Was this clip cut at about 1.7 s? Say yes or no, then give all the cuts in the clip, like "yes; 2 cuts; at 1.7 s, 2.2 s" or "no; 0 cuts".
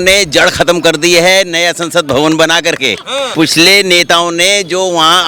no; 1 cut; at 3.2 s